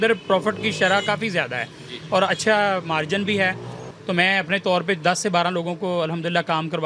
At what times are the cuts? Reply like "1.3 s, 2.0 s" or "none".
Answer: 3.9 s